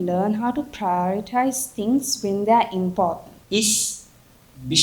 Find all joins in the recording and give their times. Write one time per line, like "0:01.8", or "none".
0:03.3